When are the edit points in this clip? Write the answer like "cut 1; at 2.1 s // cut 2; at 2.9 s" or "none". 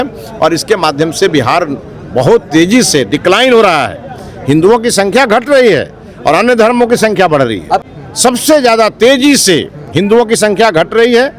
cut 1; at 7.8 s